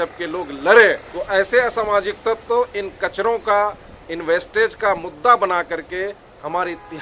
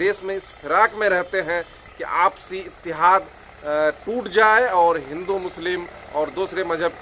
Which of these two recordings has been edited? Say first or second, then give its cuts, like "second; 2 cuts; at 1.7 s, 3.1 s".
first; 1 cut; at 1.1 s